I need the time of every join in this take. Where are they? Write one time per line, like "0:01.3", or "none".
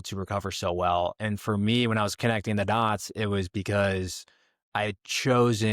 none